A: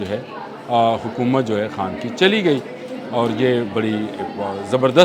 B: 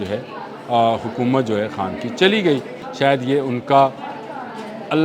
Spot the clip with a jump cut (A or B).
B